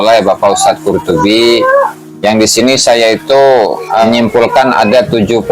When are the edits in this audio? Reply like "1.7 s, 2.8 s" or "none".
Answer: 2.0 s, 4.0 s